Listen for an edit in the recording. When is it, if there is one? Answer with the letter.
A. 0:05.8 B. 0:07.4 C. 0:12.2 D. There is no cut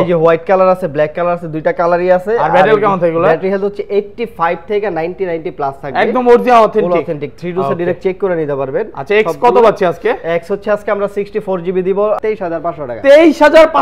C